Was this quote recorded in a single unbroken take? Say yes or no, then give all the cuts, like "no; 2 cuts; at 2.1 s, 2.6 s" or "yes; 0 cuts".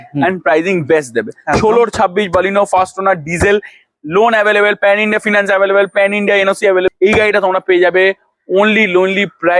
no; 1 cut; at 6.9 s